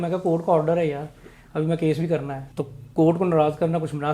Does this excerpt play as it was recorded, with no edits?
no; 1 cut; at 2.4 s

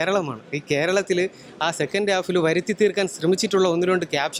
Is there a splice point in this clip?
no; 0 cuts

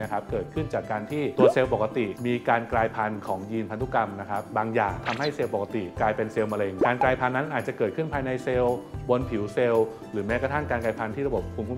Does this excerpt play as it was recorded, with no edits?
yes; 0 cuts

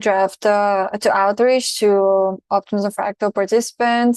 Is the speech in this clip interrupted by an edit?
no; 0 cuts

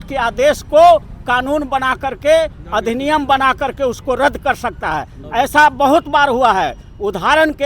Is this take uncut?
yes; 0 cuts

